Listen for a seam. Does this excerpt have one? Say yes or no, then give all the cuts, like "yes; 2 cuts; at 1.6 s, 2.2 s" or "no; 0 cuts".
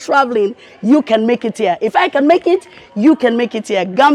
no; 0 cuts